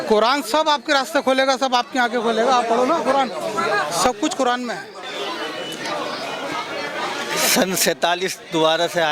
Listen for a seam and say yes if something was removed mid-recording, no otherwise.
yes